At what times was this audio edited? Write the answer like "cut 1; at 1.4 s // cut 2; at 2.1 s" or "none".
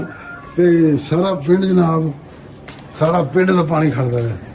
none